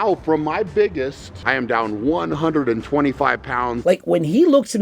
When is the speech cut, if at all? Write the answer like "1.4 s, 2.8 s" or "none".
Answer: 1.3 s, 3.8 s